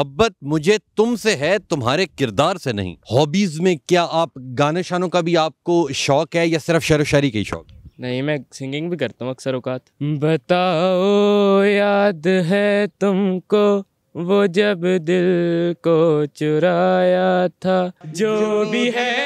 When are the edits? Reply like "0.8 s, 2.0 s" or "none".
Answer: 2.9 s, 9.9 s, 18.0 s